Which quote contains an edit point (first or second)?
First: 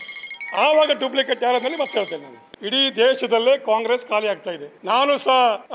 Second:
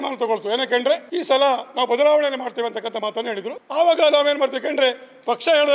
second